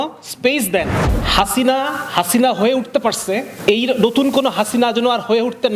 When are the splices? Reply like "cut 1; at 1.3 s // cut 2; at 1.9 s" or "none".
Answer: cut 1; at 1.0 s